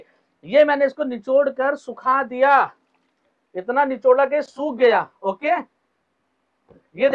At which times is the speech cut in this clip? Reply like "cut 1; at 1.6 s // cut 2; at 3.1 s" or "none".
none

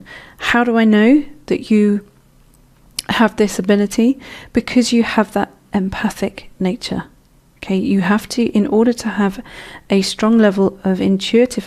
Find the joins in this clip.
cut 1; at 1.0 s

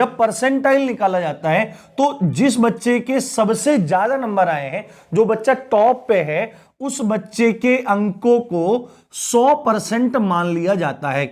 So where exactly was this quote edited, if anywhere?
none

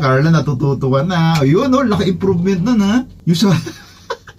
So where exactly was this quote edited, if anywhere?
cut 1; at 3.1 s

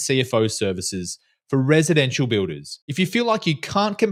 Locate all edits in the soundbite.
none

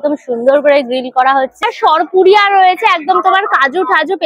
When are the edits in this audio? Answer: cut 1; at 1.6 s

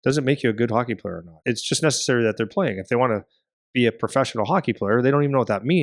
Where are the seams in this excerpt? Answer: cut 1; at 1.4 s

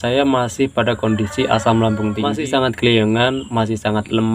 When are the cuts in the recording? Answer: cut 1; at 2.3 s

